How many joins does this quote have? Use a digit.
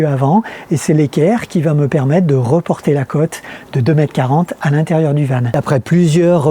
1